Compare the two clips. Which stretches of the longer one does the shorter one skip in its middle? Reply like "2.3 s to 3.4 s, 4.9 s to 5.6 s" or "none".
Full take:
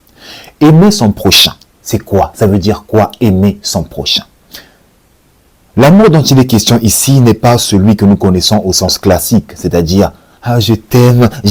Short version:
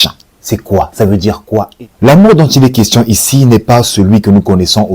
3.1 s to 5.4 s